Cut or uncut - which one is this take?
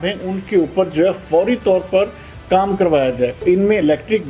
cut